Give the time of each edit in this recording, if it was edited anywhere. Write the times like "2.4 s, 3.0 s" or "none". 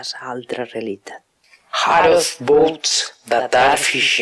none